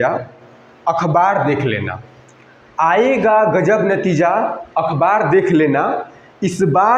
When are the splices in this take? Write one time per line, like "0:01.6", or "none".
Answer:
none